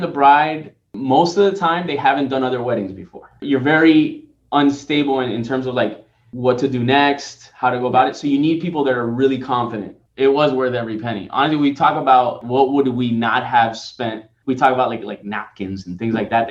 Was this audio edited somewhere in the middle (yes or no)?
yes